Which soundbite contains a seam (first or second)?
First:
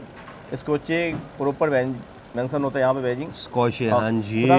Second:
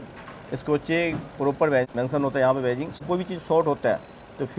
second